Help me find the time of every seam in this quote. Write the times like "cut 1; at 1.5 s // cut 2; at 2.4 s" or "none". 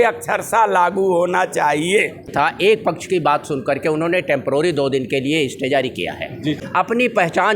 cut 1; at 2.5 s // cut 2; at 6.6 s